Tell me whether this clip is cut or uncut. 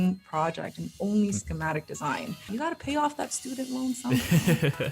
cut